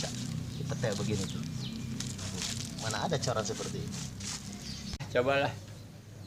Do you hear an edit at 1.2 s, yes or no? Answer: no